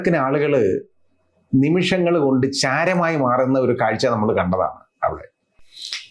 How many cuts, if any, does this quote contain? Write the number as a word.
zero